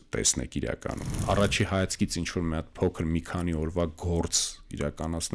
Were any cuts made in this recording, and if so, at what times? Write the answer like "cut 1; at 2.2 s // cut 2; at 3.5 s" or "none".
cut 1; at 1.1 s